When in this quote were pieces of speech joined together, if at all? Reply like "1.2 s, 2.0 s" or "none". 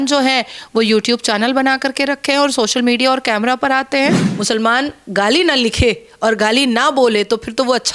4.3 s